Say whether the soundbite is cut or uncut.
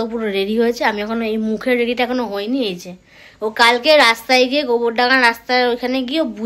uncut